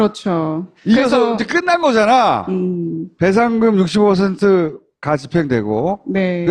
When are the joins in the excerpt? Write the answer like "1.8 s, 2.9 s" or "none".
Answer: 3.7 s

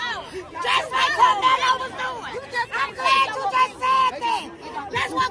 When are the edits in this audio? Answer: none

